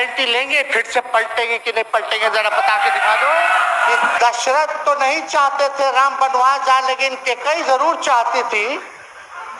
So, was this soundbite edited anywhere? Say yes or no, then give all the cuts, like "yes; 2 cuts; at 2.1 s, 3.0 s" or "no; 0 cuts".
yes; 1 cut; at 4.1 s